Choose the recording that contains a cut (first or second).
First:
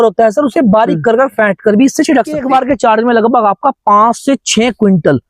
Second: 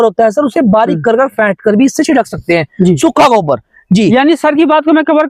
first